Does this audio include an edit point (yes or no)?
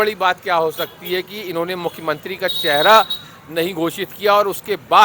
no